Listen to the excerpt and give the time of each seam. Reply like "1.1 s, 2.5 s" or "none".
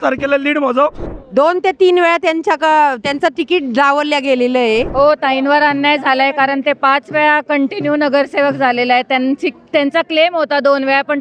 1.1 s, 4.9 s